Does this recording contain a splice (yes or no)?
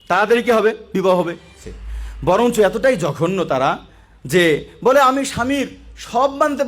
yes